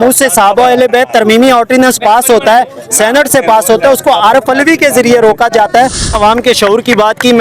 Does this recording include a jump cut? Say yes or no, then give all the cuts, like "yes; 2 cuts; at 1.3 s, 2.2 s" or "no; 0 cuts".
yes; 1 cut; at 6.1 s